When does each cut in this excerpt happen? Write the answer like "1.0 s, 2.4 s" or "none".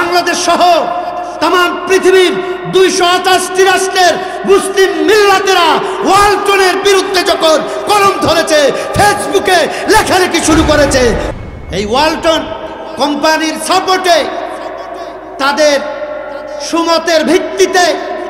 11.3 s